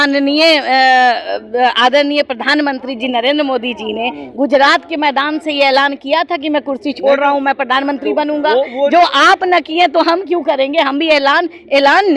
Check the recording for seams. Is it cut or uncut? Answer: uncut